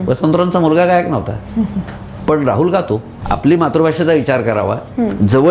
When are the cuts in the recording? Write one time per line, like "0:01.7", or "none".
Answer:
0:03.2